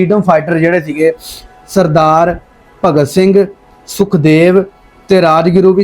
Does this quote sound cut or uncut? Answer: uncut